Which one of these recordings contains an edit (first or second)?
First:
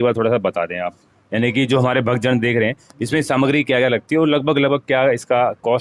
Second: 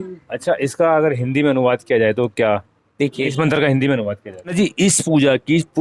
second